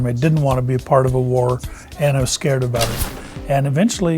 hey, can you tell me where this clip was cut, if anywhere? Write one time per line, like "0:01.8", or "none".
0:03.0

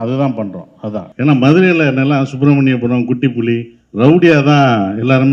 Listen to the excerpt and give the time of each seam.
0:01.1

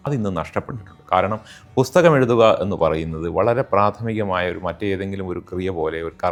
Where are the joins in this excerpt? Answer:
none

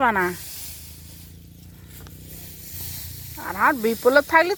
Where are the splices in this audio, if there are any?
none

